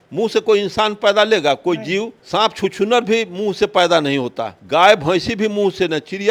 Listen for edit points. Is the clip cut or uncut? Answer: uncut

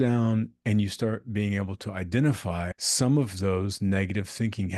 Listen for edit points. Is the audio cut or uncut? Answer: cut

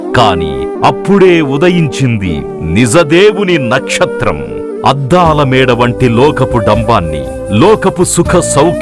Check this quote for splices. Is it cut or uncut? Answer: uncut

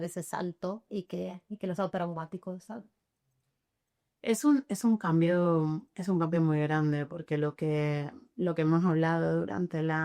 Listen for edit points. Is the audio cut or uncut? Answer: uncut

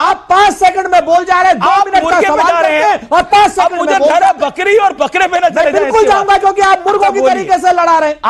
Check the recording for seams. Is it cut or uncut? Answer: uncut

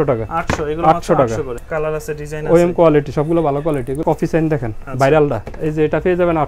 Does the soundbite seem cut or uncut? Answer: cut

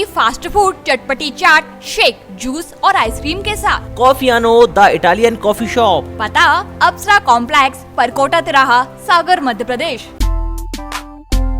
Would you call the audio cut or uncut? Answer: cut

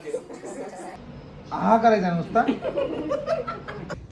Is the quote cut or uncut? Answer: cut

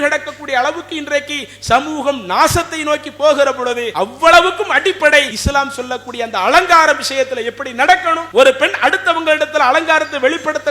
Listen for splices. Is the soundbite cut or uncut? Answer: cut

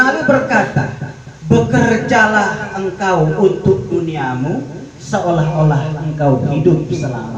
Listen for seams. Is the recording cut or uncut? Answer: uncut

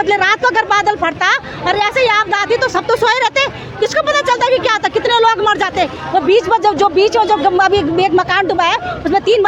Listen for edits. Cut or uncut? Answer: uncut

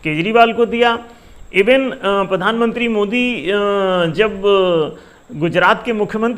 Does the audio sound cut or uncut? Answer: uncut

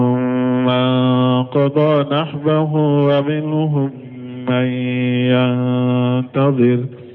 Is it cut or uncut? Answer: uncut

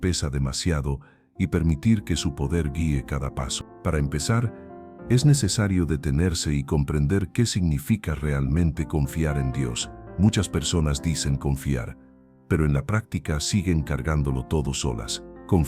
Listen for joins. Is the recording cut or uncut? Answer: cut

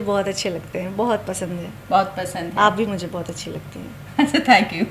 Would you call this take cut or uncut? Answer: uncut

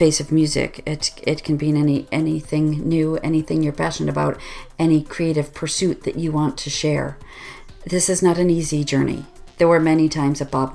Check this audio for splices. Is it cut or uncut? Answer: cut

